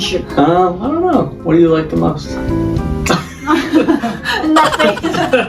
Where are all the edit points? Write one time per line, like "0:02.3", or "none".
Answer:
0:02.3